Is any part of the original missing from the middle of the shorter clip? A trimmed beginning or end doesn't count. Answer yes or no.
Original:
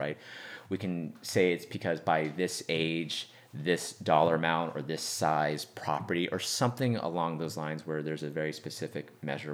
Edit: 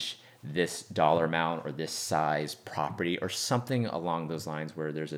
no